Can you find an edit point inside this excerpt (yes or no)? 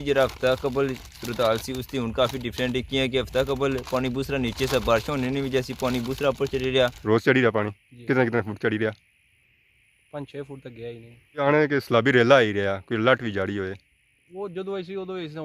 yes